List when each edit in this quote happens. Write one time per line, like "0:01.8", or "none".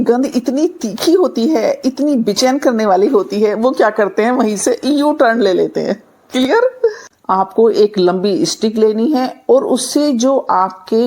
0:07.1